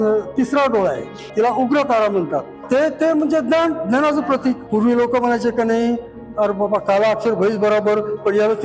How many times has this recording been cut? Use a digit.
3